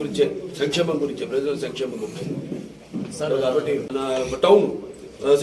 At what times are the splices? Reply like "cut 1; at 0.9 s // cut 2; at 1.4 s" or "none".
cut 1; at 3.9 s